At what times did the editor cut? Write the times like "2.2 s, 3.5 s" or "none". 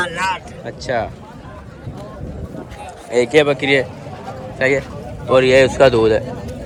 none